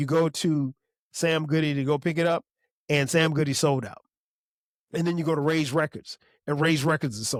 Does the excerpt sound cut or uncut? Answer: uncut